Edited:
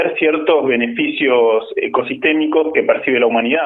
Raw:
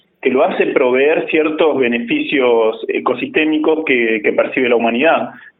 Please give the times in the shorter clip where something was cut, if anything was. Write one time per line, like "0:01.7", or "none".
0:02.7